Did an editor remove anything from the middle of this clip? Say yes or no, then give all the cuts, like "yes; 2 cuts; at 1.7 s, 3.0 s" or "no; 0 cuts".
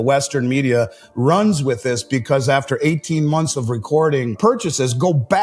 yes; 1 cut; at 4.4 s